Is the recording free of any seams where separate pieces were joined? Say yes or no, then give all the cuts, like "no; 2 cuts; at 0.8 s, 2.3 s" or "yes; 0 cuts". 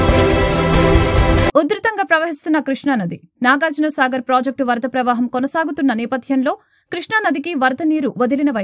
no; 1 cut; at 1.4 s